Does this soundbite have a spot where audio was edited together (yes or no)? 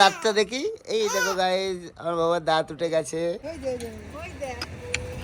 yes